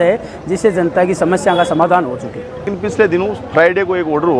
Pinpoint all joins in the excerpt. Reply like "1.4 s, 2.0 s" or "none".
2.7 s

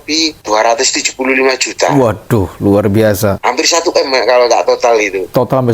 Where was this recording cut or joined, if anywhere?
3.4 s

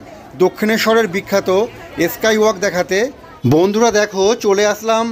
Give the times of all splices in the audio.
3.3 s

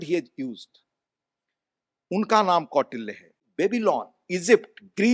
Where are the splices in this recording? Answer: 3.4 s

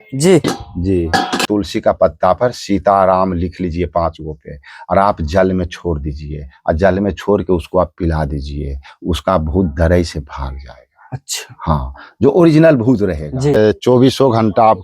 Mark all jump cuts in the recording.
1.4 s, 13.6 s

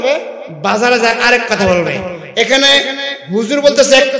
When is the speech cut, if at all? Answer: none

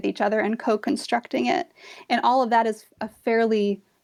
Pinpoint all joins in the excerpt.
none

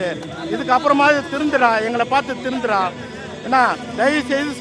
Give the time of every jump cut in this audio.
none

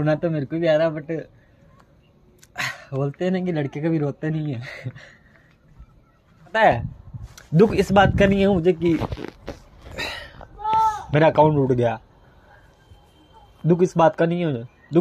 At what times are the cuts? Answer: 6.5 s

